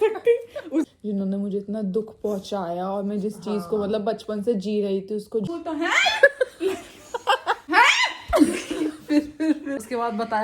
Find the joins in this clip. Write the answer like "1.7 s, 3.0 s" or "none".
0.9 s, 5.5 s, 7.6 s, 9.8 s